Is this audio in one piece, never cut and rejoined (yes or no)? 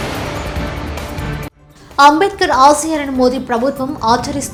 yes